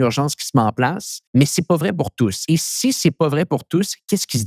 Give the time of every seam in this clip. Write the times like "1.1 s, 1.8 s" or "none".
1.1 s, 2.4 s